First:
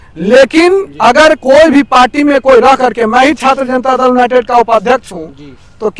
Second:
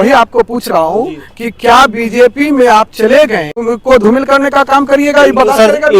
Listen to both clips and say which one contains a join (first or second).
second